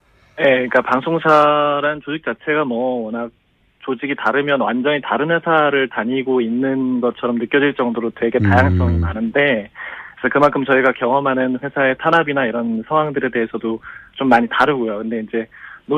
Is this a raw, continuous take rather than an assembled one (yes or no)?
no